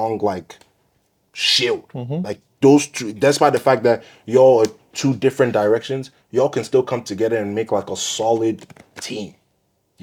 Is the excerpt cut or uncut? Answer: uncut